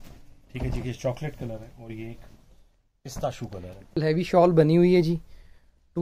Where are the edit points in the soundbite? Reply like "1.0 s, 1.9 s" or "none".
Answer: 4.0 s